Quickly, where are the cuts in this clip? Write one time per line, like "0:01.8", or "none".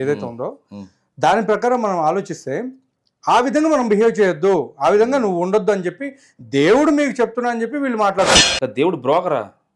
0:08.3